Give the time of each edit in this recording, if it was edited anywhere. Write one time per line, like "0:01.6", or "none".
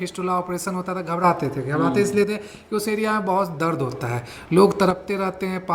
none